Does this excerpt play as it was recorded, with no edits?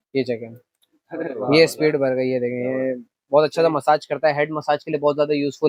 yes; 0 cuts

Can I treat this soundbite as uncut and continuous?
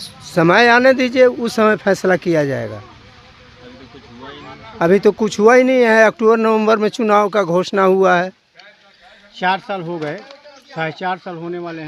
yes; 0 cuts

